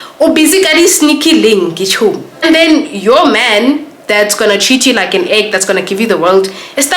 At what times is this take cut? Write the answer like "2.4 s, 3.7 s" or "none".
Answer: 2.3 s

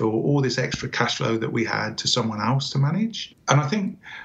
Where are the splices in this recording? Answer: 3.3 s

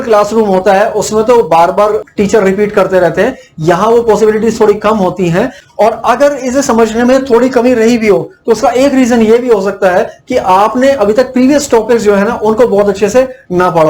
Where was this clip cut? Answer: 2.1 s, 5.6 s

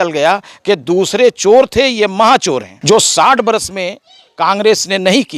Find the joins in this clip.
2.7 s

